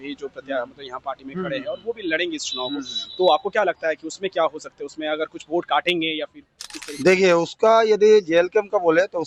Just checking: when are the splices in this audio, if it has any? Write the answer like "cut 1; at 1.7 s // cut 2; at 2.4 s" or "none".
none